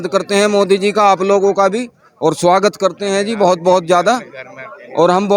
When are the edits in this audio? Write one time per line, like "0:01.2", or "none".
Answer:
none